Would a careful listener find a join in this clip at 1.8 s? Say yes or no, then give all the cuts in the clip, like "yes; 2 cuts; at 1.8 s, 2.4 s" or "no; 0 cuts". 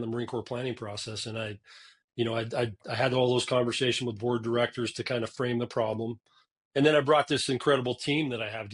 no; 0 cuts